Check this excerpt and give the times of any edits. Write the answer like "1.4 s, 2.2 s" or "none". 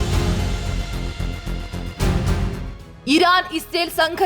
2.7 s